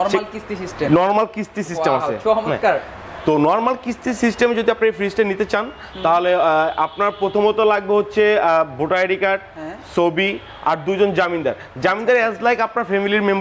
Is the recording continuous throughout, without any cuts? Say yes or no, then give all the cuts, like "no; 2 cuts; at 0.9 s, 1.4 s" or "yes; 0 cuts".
yes; 0 cuts